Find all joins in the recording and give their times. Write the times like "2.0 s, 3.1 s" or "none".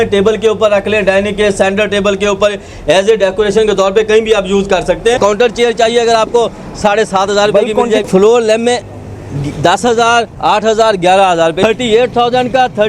5.2 s, 8.1 s, 11.6 s